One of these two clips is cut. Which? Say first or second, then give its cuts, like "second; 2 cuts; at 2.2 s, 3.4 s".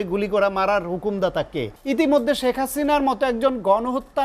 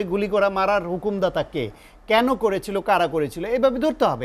first; 1 cut; at 1.7 s